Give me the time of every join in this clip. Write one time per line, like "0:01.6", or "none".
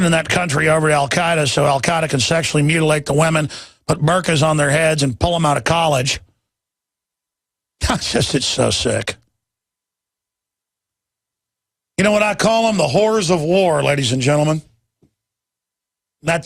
0:15.1